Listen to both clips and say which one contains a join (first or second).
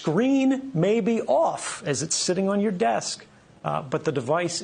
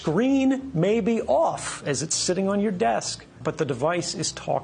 second